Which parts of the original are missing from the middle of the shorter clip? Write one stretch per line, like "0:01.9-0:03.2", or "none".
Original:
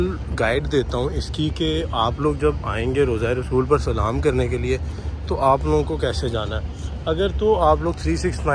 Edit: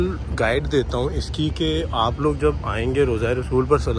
none